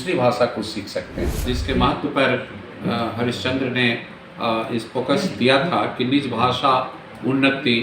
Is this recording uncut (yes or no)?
no